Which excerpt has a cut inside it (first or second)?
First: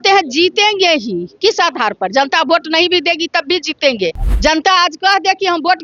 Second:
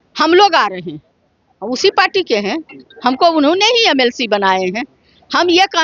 first